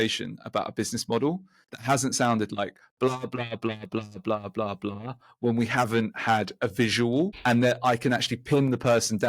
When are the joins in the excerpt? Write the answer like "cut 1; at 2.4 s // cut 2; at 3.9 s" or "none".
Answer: none